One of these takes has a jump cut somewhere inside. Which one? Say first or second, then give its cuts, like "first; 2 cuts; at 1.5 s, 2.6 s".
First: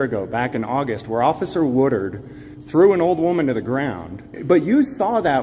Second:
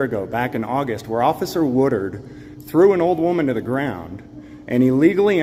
first; 1 cut; at 4.3 s